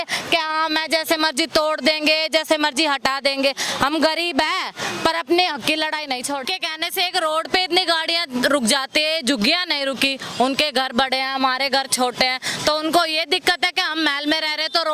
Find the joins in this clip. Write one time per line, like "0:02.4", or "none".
0:06.5